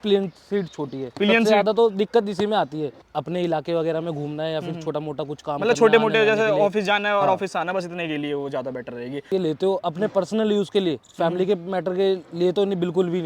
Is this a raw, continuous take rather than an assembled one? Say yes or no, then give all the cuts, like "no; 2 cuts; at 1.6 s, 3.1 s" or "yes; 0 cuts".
no; 2 cuts; at 3.0 s, 9.3 s